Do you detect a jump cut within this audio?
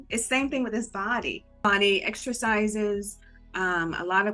yes; 1 cut; at 1.6 s

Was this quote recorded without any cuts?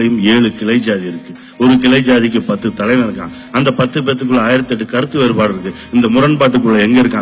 yes; 0 cuts

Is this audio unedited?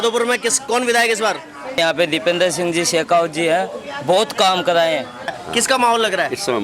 no; 2 cuts; at 1.8 s, 5.3 s

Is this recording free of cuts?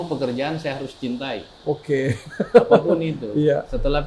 yes; 0 cuts

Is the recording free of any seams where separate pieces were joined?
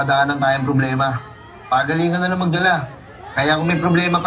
yes; 0 cuts

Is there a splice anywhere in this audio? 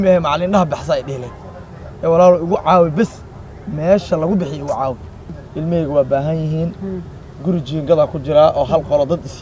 yes; 1 cut; at 5.4 s

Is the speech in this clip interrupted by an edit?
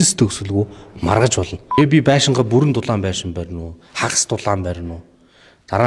yes; 1 cut; at 1.6 s

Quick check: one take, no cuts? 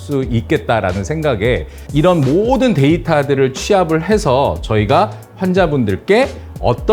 no; 1 cut; at 1.8 s

